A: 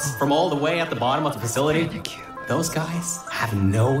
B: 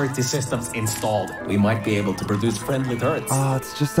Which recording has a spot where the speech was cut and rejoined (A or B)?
B